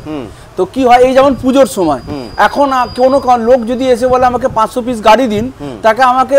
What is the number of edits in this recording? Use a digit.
0